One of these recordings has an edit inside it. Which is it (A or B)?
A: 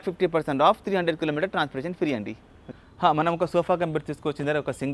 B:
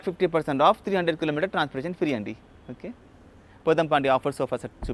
A